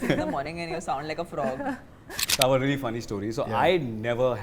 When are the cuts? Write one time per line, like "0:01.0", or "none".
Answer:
0:02.2